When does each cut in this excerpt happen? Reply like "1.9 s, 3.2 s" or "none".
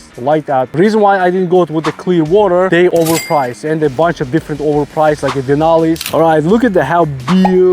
2.8 s, 6.1 s